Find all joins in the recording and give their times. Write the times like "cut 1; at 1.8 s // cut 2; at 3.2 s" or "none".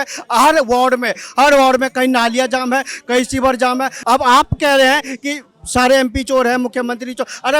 cut 1; at 3.9 s